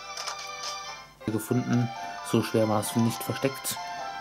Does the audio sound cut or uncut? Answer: cut